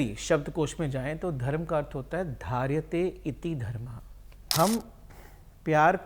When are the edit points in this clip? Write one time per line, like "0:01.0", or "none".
0:04.5